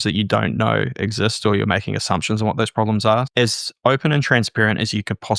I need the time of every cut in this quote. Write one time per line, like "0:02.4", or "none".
0:03.3